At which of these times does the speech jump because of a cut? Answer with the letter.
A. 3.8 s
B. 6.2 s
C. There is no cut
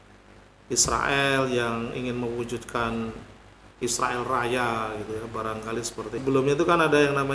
B